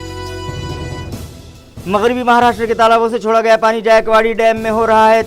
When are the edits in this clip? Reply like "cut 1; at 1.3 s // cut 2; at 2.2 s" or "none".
cut 1; at 1.0 s